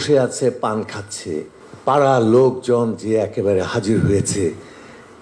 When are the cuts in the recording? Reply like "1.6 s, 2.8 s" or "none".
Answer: 1.6 s